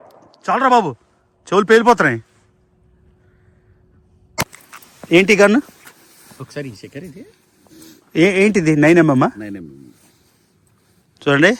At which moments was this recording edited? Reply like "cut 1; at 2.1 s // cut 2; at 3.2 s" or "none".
cut 1; at 4.4 s

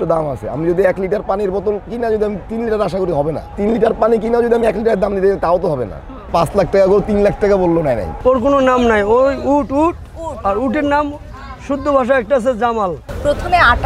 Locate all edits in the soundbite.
cut 1; at 3.5 s // cut 2; at 6.3 s // cut 3; at 8.1 s // cut 4; at 13.1 s

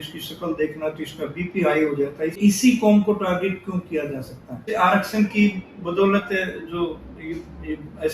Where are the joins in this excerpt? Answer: cut 1; at 2.4 s // cut 2; at 4.7 s

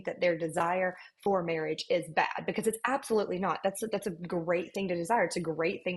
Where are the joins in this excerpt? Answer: none

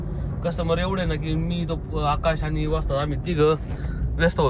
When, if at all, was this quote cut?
none

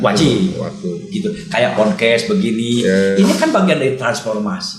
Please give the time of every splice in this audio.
none

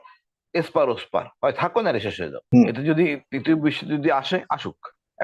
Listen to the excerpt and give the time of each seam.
cut 1; at 2.3 s

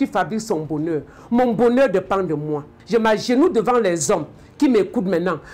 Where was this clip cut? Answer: cut 1; at 2.8 s

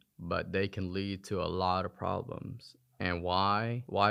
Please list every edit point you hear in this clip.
none

